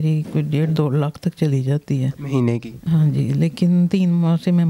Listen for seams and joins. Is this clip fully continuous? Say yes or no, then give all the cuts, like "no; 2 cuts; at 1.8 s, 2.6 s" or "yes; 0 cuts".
yes; 0 cuts